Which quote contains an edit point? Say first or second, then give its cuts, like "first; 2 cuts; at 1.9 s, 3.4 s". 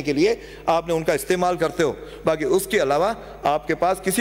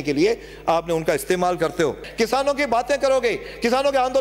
second; 1 cut; at 2.0 s